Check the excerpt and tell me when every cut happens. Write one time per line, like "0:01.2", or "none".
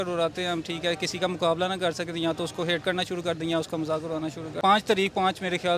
0:04.5